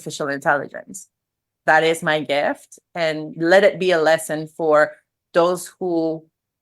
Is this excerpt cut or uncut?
cut